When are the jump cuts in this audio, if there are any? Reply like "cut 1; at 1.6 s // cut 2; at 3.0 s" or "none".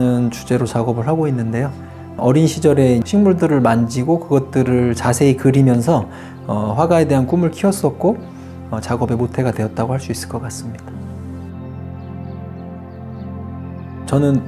none